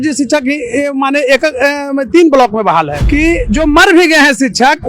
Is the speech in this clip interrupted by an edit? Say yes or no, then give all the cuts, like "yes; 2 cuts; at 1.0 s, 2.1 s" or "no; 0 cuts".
yes; 1 cut; at 3.0 s